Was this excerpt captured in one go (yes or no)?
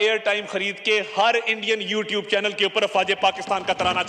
yes